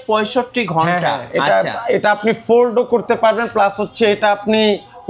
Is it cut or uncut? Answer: uncut